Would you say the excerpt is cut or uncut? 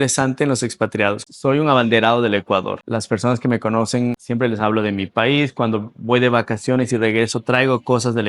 cut